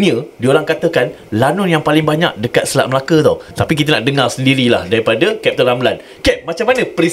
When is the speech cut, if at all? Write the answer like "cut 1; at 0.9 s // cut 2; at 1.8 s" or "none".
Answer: cut 1; at 3.5 s